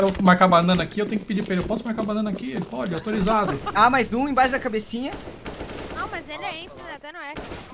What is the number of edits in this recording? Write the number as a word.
one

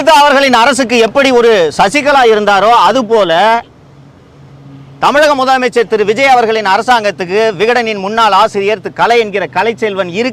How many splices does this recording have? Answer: zero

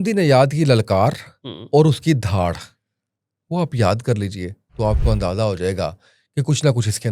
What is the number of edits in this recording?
zero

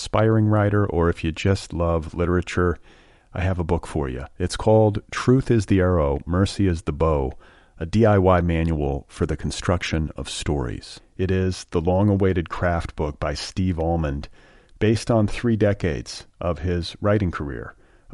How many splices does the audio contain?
zero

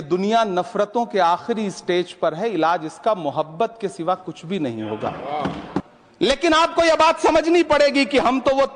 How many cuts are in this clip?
one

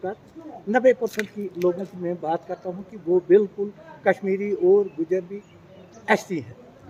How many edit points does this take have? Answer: zero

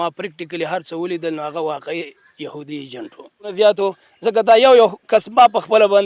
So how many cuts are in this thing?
one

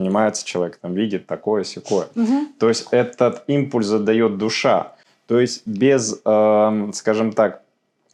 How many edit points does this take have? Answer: zero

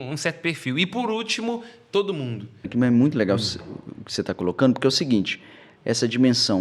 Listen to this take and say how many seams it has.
one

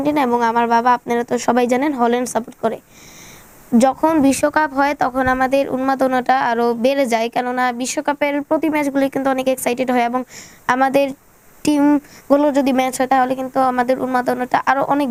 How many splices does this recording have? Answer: zero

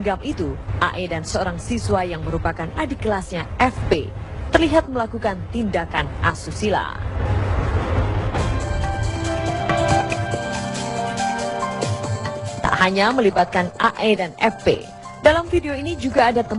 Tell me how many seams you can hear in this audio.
one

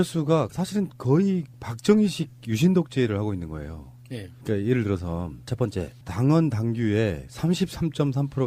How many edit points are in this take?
zero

